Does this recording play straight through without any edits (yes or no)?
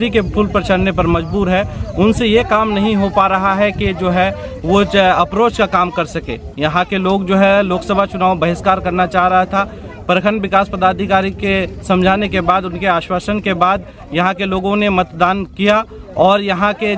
yes